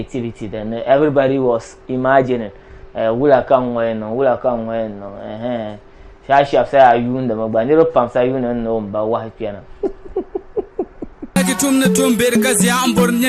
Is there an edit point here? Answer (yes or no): yes